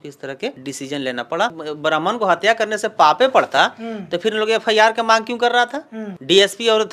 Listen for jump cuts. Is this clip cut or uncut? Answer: cut